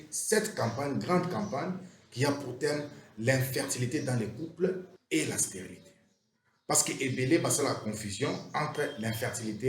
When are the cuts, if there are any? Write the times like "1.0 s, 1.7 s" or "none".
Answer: 4.9 s